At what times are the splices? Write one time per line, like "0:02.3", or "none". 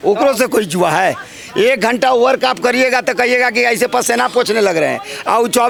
none